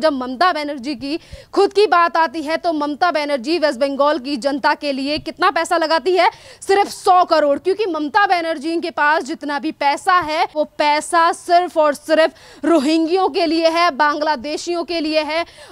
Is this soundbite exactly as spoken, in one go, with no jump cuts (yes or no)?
no